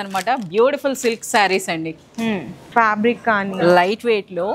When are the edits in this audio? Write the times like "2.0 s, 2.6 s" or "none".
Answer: 2.6 s